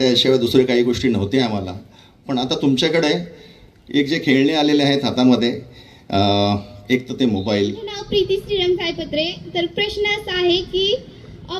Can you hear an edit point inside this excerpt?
yes; 1 cut; at 7.9 s

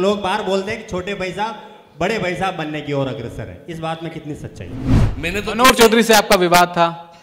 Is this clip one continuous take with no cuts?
no; 1 cut; at 5.0 s

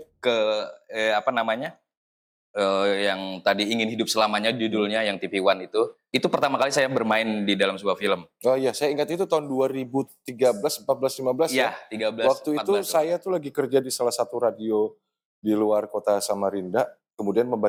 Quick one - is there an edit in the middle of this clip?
no; 0 cuts

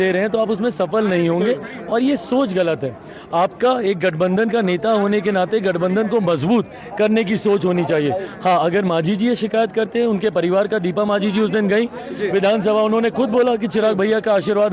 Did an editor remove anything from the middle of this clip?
no; 0 cuts

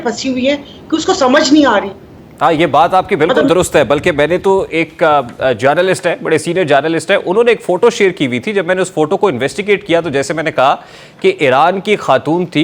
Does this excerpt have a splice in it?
no; 0 cuts

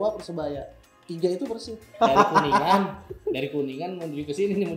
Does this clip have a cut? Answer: yes; 1 cut; at 1.8 s

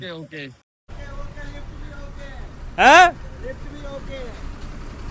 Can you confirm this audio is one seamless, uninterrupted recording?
no; 1 cut; at 0.9 s

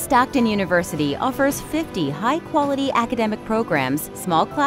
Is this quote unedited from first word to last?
yes; 0 cuts

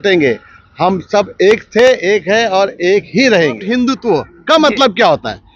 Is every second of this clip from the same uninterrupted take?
no; 1 cut; at 3.6 s

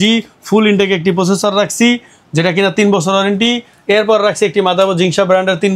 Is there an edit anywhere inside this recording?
no; 0 cuts

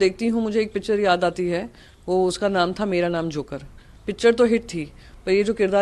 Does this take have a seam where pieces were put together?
no; 0 cuts

